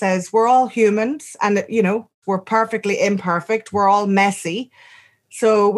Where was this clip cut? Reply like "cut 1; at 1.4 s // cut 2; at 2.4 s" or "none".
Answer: cut 1; at 2.2 s